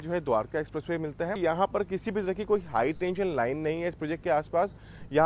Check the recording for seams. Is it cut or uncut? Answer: cut